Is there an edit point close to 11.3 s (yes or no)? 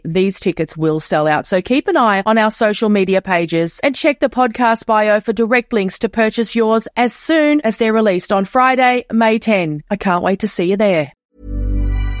yes